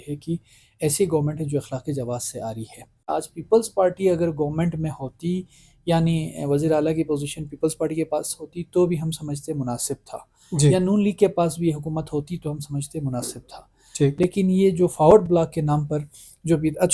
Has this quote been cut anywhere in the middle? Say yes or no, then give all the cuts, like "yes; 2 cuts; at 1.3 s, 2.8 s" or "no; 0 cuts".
yes; 1 cut; at 3.1 s